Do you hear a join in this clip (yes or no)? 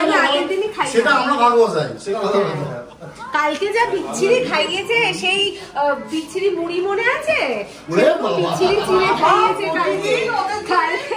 no